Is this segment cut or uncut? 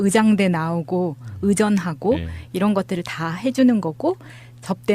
cut